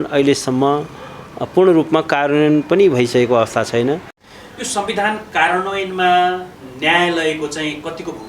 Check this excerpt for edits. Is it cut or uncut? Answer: cut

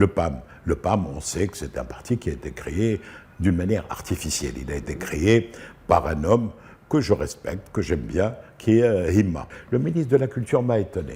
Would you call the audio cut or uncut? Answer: cut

